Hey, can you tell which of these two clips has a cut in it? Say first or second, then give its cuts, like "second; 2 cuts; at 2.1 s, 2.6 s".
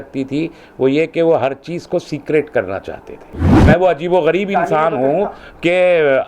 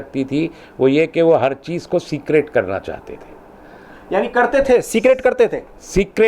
first; 1 cut; at 3.5 s